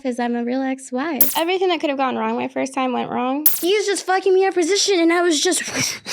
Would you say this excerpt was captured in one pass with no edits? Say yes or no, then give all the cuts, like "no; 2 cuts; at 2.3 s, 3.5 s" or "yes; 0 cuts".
no; 2 cuts; at 1.3 s, 3.6 s